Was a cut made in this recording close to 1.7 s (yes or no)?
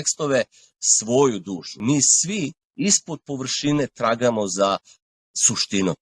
yes